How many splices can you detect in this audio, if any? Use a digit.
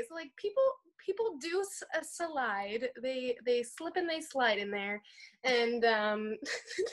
0